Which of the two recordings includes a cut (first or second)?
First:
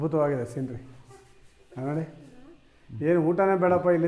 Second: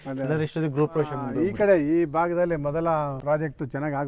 second